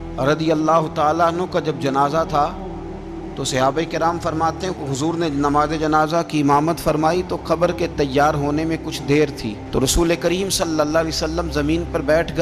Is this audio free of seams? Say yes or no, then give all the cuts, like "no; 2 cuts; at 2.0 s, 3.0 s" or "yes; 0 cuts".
yes; 0 cuts